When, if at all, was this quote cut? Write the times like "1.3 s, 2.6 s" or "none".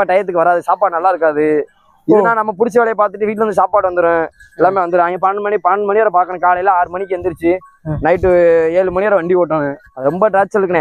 9.9 s